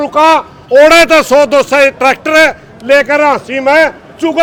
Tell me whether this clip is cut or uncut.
uncut